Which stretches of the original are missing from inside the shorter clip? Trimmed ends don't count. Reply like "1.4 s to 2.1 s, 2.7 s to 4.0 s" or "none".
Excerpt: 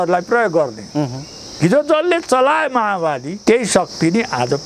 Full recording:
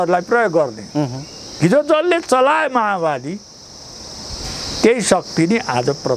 3.3 s to 4.7 s